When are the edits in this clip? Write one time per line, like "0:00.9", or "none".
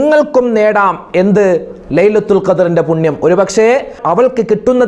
none